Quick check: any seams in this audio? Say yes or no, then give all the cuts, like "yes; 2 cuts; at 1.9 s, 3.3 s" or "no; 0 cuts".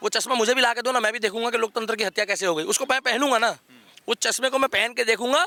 no; 0 cuts